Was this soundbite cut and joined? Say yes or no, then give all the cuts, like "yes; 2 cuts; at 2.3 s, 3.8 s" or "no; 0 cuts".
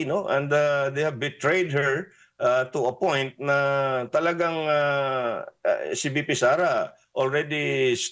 no; 0 cuts